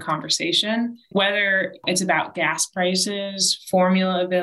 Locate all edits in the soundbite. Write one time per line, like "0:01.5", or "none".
0:01.0